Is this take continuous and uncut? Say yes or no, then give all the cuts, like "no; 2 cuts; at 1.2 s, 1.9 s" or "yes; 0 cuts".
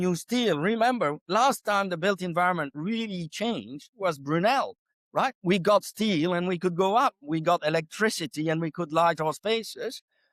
yes; 0 cuts